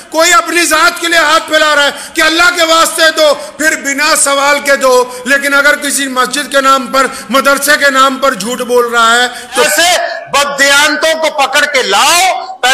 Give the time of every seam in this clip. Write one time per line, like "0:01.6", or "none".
0:09.7